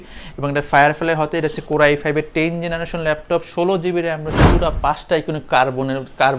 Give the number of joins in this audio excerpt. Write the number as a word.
one